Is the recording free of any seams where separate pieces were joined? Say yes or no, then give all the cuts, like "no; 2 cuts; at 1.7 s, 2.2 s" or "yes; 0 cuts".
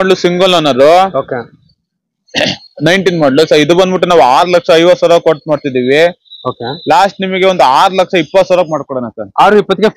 yes; 0 cuts